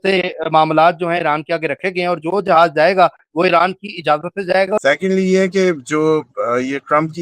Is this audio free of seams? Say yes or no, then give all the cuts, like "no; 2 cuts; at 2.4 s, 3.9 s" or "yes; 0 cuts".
no; 1 cut; at 4.8 s